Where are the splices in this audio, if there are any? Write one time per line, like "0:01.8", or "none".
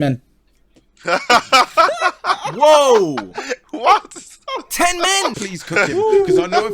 0:05.4